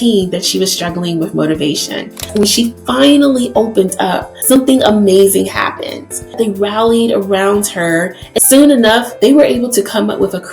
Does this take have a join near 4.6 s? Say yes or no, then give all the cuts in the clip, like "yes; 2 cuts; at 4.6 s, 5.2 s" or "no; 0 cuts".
yes; 5 cuts; at 2.3 s, 4.6 s, 6.5 s, 8.2 s, 9.3 s